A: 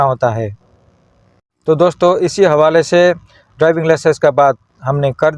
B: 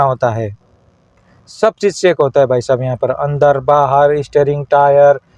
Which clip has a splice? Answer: B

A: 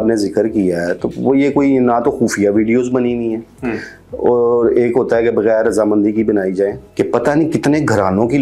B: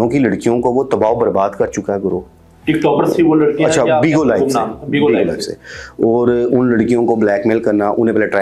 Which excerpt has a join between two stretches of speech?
A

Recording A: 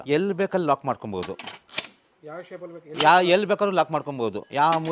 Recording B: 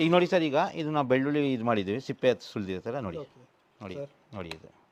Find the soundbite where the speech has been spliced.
B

